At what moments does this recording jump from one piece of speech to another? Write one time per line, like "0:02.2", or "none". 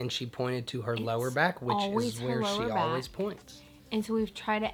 none